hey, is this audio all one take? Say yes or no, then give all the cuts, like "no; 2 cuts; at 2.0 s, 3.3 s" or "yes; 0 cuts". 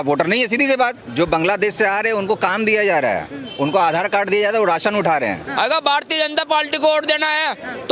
no; 2 cuts; at 1.0 s, 5.4 s